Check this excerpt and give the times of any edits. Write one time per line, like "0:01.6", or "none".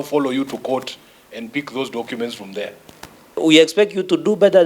0:03.4